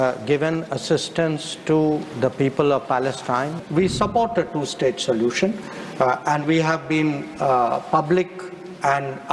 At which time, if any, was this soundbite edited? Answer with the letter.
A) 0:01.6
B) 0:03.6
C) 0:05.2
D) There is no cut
B